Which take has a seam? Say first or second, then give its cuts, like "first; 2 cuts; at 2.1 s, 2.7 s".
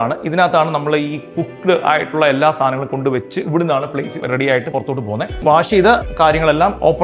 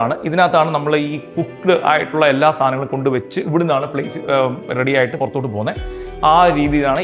first; 2 cuts; at 4.2 s, 5.4 s